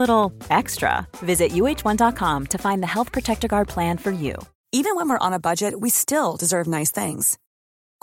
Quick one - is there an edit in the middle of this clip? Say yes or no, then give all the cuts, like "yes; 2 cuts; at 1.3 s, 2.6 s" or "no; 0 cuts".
yes; 1 cut; at 4.5 s